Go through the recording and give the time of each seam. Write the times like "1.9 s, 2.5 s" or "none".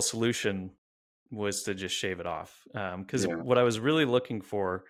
none